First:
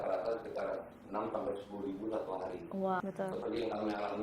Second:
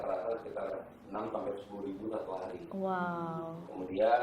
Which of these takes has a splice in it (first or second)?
first